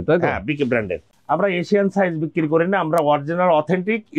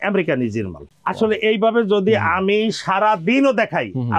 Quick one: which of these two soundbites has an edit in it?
first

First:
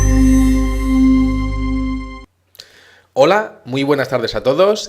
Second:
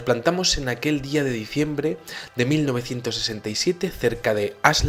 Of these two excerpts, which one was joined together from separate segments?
first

